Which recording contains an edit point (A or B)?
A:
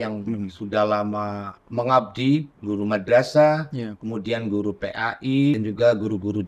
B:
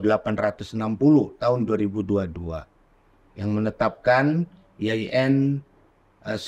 A